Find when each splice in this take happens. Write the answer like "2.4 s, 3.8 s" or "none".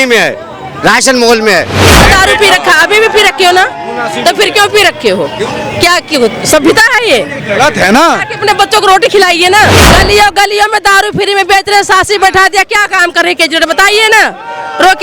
1.8 s, 9.8 s